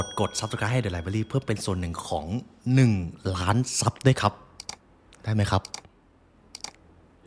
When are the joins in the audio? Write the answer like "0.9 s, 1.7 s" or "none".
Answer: none